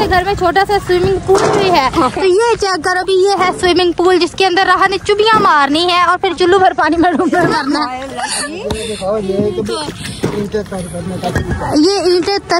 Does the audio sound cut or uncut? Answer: uncut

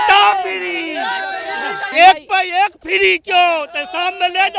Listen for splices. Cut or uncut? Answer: uncut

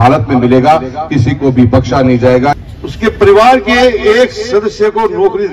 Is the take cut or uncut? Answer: cut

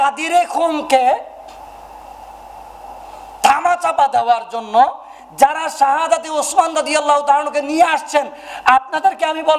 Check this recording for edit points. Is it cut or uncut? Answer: uncut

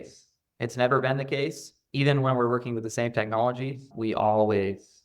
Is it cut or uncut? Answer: cut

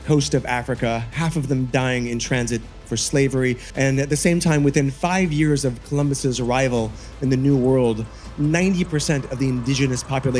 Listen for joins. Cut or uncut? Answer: cut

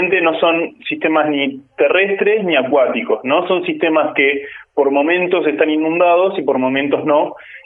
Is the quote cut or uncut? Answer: uncut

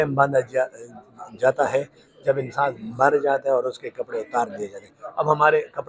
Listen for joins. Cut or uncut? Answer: uncut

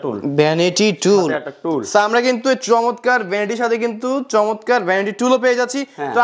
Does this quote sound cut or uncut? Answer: uncut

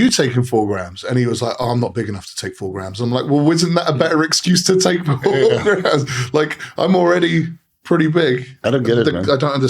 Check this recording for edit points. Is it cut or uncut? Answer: cut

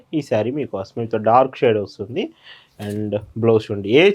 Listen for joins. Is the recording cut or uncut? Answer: uncut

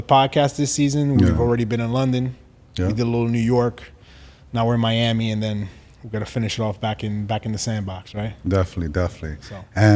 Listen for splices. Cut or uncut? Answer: uncut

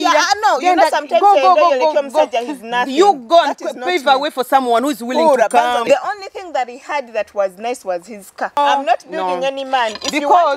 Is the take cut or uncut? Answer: cut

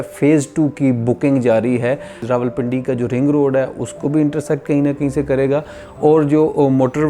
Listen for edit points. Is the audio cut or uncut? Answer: cut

